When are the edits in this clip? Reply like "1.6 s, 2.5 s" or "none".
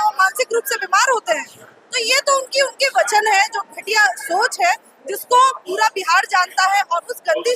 none